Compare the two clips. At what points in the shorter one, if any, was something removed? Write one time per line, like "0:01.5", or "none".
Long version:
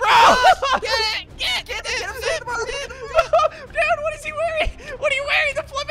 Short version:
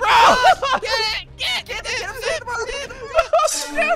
none